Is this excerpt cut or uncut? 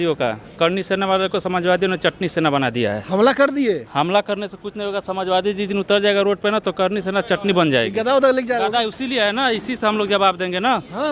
uncut